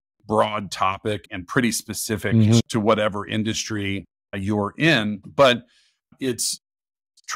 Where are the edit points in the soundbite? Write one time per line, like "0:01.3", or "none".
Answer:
0:02.6
0:05.2